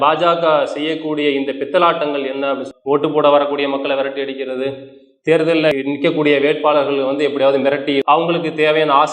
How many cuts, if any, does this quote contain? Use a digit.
2